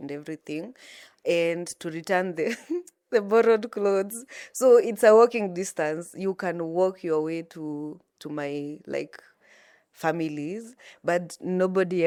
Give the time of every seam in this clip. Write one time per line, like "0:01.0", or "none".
none